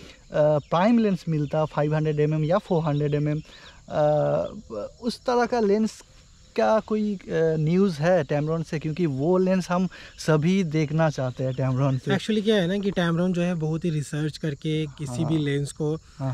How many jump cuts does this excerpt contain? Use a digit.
0